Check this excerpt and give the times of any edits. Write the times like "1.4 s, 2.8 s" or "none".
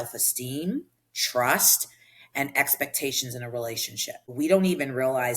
4.3 s